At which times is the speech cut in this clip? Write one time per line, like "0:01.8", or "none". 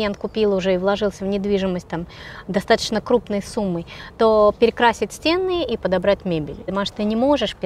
0:06.7

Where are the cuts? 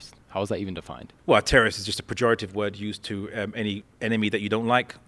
0:01.0
0:03.9

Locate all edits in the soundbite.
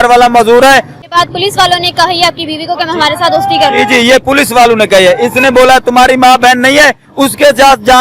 0:00.9

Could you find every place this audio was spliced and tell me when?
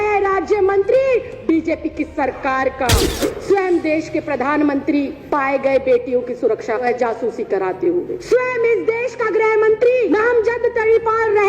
0:02.9
0:05.2
0:06.8
0:08.2
0:10.1

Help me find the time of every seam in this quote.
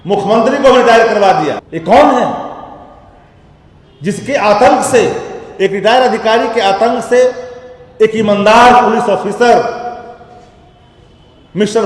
0:01.7

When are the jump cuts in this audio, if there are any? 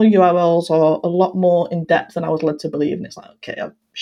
none

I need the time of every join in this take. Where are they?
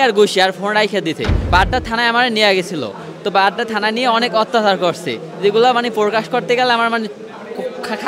0:01.4

